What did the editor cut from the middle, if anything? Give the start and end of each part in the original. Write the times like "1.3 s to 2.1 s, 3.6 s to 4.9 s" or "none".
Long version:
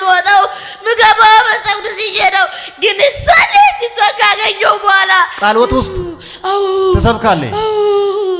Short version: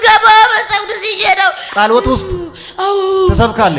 2.6 s to 5.3 s